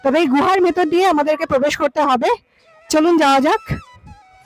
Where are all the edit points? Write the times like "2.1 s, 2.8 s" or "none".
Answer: none